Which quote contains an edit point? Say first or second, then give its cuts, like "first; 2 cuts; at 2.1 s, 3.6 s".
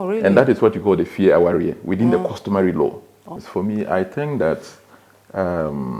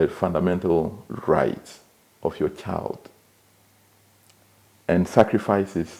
first; 1 cut; at 3.4 s